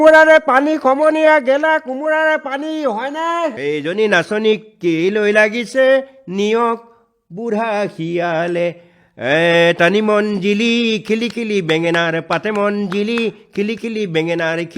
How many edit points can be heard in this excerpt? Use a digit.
1